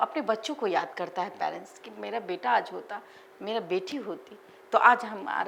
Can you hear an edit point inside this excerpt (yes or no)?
no